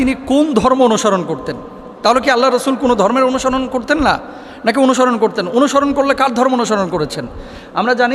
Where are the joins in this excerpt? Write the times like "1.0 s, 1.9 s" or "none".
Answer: none